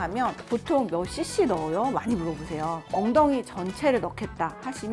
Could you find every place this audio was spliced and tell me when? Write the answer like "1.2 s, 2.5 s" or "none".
none